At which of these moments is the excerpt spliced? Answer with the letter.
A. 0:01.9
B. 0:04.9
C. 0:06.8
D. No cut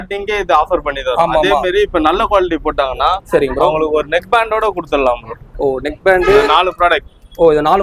D